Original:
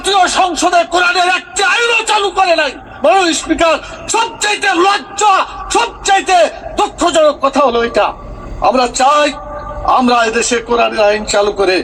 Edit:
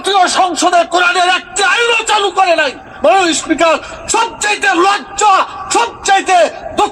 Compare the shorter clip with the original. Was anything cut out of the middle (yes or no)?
no